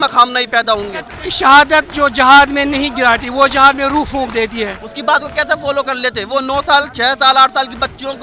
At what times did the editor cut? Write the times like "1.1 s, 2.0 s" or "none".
1.2 s, 4.8 s